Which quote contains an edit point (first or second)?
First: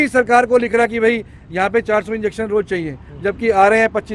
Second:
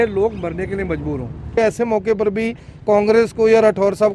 second